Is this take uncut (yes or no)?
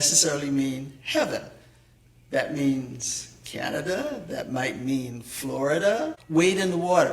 no